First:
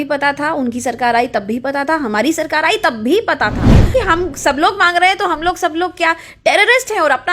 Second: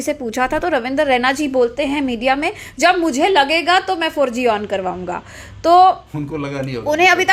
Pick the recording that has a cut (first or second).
first